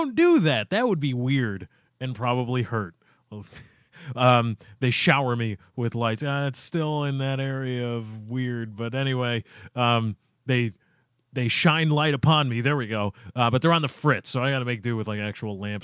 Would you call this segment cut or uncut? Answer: cut